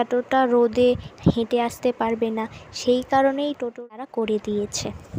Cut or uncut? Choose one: cut